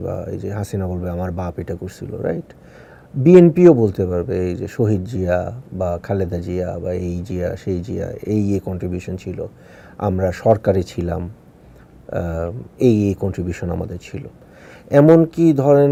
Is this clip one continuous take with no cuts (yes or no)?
yes